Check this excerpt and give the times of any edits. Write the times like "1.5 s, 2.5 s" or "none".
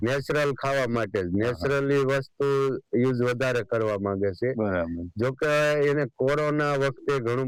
none